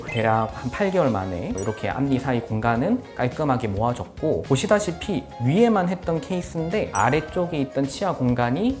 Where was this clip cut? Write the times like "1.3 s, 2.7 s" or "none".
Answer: none

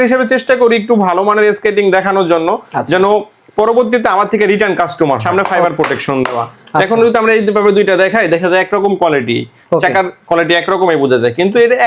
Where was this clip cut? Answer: 5.2 s

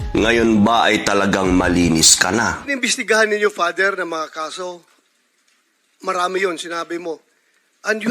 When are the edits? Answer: 2.6 s

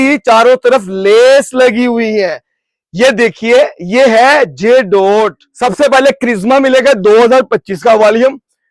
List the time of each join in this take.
5.4 s

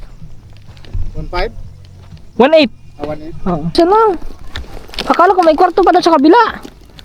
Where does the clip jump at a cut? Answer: 3.8 s

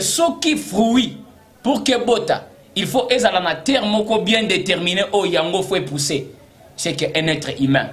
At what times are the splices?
none

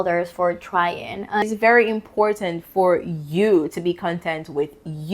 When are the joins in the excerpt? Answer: 1.4 s

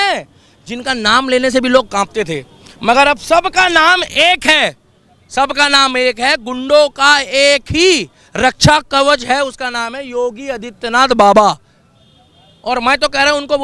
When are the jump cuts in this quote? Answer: none

